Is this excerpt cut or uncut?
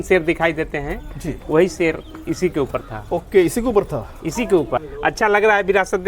cut